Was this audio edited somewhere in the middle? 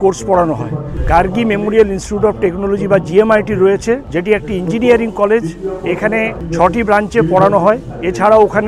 yes; 3 cuts; at 0.9 s, 4.1 s, 6.4 s

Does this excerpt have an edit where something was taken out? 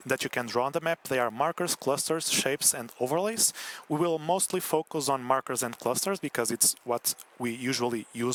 no; 0 cuts

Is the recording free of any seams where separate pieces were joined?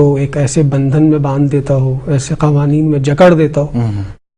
yes; 0 cuts

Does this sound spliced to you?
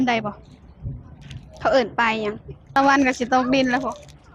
yes; 1 cut; at 2.8 s

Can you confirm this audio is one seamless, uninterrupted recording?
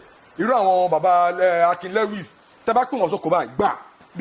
yes; 0 cuts

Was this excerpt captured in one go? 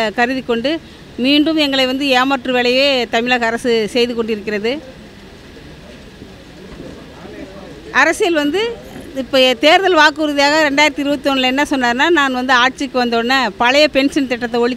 yes; 0 cuts

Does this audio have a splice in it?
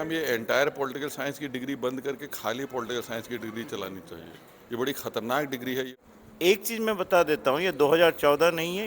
yes; 1 cut; at 5.9 s

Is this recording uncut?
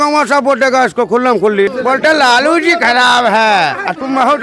no; 1 cut; at 1.8 s

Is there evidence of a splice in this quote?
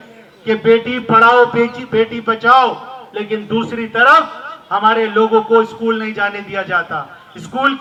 no; 0 cuts

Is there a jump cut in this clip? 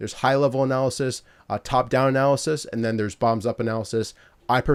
no; 0 cuts

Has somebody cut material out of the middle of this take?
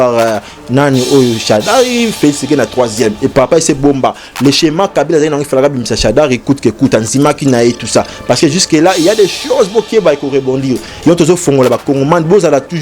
no; 0 cuts

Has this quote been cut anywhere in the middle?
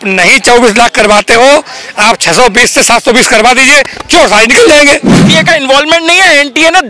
yes; 1 cut; at 5.2 s

